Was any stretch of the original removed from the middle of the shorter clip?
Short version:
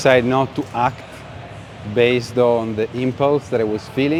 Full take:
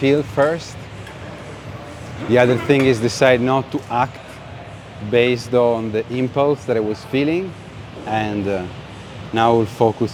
no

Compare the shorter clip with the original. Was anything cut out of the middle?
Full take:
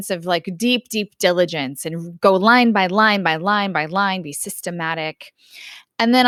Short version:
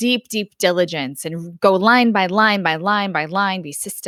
no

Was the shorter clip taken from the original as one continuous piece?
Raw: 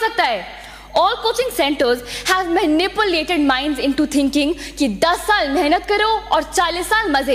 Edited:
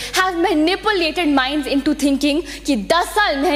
yes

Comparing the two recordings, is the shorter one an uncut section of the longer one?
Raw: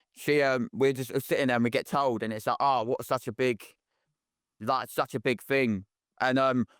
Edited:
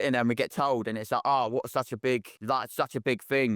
no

